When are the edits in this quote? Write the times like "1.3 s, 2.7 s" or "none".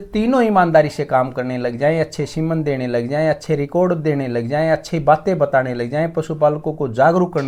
none